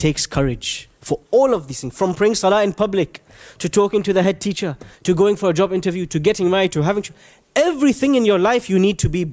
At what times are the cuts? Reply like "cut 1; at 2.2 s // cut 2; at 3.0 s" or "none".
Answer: none